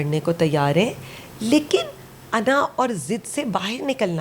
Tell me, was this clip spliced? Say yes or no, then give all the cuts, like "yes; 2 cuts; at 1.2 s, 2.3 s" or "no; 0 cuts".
no; 0 cuts